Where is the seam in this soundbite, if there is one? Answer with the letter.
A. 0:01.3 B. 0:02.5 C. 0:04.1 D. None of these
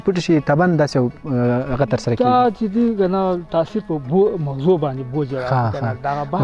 D